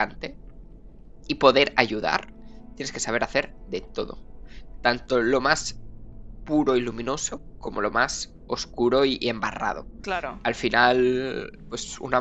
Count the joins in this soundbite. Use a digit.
1